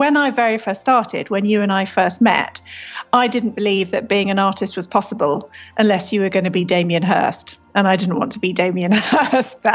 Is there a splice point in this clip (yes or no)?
no